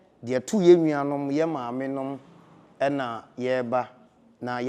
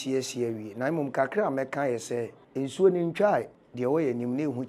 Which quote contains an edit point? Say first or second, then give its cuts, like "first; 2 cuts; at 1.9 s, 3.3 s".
second; 2 cuts; at 2.4 s, 3.6 s